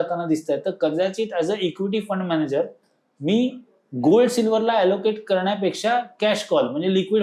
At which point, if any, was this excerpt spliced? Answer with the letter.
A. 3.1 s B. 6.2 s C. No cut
C